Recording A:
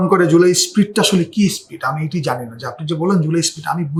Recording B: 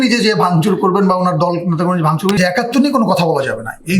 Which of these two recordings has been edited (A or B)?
B